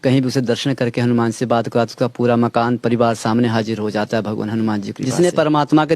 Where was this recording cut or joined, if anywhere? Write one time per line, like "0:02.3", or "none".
0:05.0